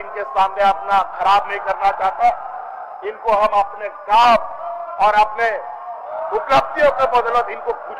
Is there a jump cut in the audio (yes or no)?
no